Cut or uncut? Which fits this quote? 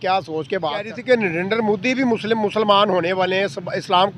cut